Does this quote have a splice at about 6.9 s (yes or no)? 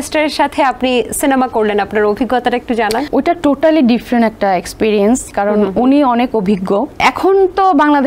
yes